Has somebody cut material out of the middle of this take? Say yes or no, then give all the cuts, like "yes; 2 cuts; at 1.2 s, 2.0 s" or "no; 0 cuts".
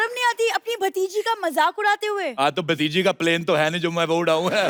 no; 0 cuts